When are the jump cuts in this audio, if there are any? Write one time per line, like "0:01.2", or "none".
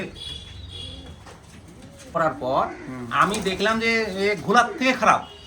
0:02.1